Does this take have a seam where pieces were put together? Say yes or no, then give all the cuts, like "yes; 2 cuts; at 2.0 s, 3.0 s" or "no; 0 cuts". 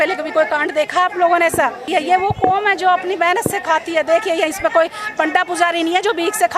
yes; 1 cut; at 1.9 s